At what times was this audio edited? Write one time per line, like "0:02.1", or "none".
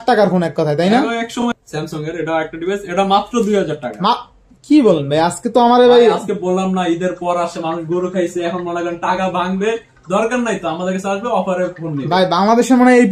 0:01.4